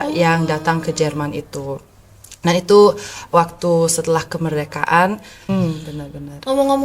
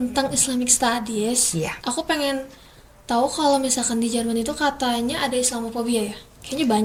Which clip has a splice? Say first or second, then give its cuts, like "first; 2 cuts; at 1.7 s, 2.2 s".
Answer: first; 1 cut; at 5.3 s